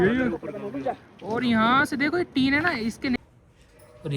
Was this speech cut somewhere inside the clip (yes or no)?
yes